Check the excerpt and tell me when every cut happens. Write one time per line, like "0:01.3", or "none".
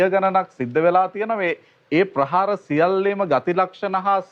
none